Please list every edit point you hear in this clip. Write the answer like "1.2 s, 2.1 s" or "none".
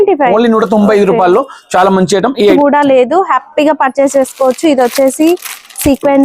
2.5 s